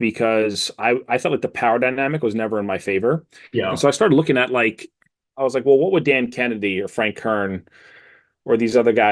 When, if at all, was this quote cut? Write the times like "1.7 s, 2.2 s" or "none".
none